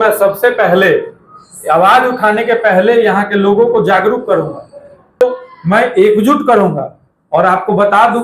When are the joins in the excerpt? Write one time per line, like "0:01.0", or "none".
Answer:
0:05.2

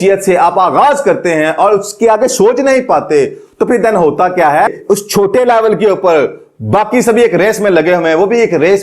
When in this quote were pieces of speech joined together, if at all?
0:04.7

